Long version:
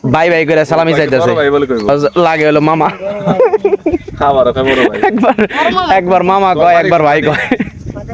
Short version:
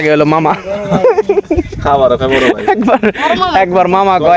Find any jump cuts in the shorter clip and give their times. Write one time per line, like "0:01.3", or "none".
none